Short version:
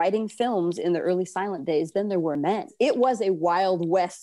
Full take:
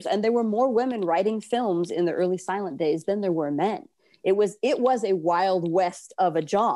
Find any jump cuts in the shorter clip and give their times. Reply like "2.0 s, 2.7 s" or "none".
2.7 s